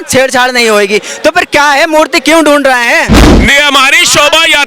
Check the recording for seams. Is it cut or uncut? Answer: cut